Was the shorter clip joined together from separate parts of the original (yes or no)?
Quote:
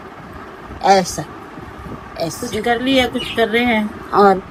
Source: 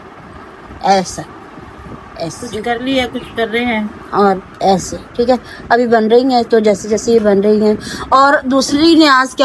no